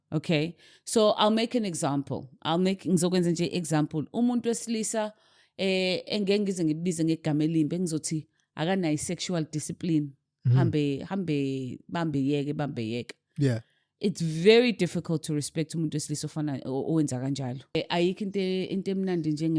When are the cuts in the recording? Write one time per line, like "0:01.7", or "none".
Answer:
0:17.8